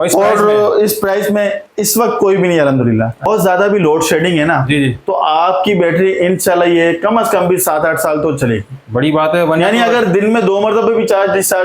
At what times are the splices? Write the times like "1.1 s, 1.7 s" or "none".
3.3 s